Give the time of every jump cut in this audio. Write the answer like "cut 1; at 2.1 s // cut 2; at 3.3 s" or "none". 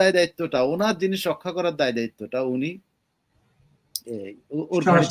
none